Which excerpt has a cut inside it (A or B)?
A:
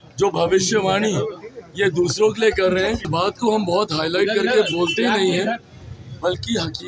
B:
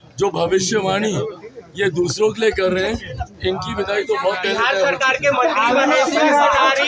A